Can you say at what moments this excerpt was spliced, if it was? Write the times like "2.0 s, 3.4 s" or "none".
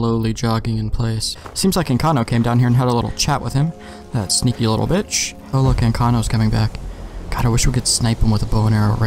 1.3 s, 5.5 s